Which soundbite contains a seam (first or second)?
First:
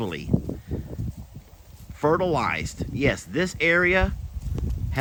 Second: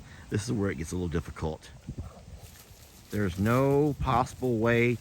second